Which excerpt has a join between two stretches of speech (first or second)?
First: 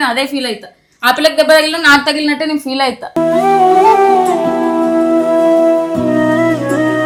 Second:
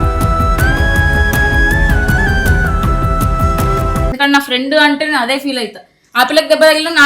second